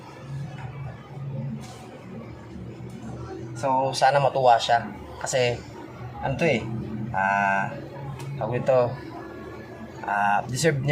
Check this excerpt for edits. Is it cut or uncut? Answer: uncut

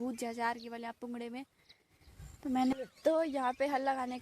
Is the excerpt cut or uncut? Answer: cut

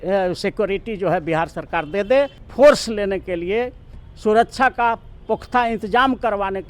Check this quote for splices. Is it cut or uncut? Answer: cut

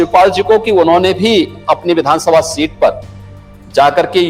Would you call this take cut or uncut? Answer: uncut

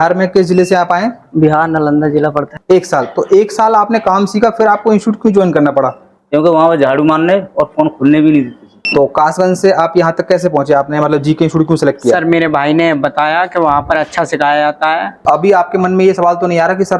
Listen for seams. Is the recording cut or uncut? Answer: cut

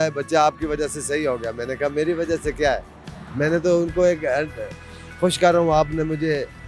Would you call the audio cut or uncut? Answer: uncut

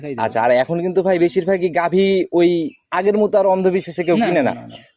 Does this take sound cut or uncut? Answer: uncut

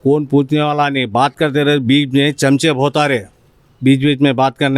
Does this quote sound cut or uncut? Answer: uncut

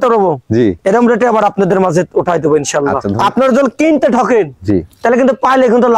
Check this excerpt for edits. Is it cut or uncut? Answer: cut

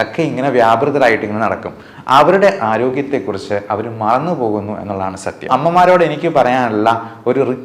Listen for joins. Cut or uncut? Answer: cut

